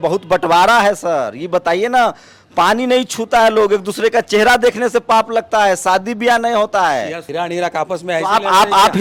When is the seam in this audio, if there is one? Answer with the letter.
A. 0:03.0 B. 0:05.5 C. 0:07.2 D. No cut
C